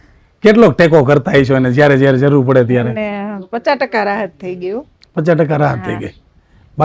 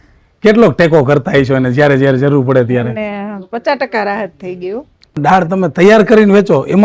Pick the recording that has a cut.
second; 1 cut; at 5.2 s

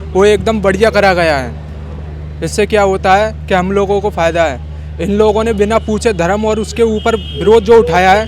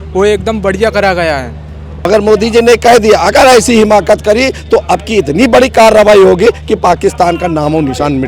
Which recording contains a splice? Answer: second; 1 cut; at 1.9 s

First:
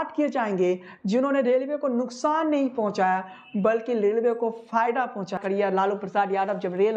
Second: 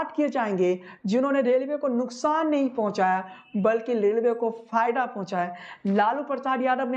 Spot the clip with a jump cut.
first; 1 cut; at 5.4 s

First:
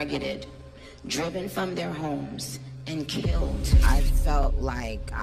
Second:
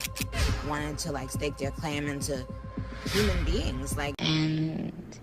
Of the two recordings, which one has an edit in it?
second; 1 cut; at 4.1 s

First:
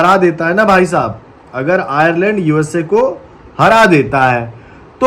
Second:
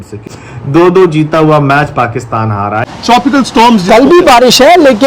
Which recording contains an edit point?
second; 1 cut; at 2.9 s

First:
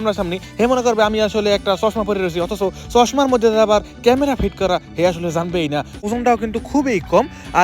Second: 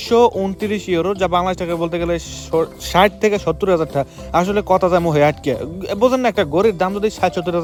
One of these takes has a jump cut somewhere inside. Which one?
first; 1 cut; at 6.0 s

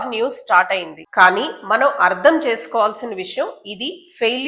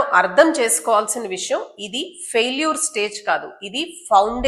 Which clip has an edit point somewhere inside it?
first; 1 cut; at 1.0 s

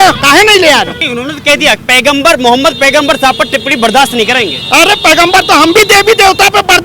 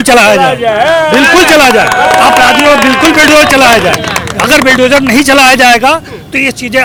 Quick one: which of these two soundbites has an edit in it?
first; 1 cut; at 1.0 s

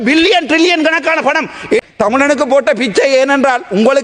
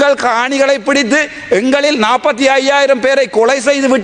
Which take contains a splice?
first; 1 cut; at 1.8 s

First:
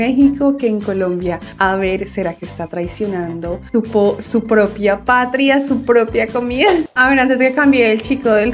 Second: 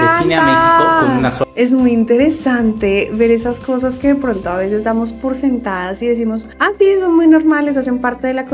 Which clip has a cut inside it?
first; 1 cut; at 6.9 s

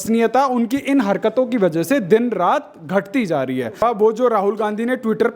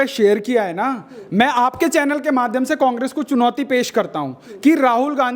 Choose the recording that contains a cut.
first; 1 cut; at 3.8 s

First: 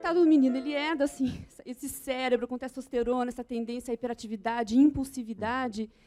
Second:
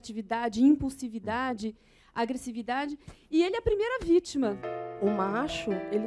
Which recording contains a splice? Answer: second; 1 cut; at 4.6 s

